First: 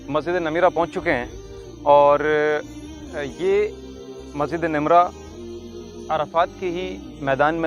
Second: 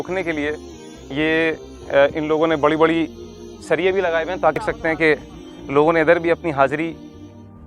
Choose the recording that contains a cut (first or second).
second